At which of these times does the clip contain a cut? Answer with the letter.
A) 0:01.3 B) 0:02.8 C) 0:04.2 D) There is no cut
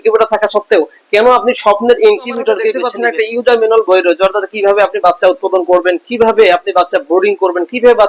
B